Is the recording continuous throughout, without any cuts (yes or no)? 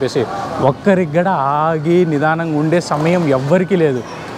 yes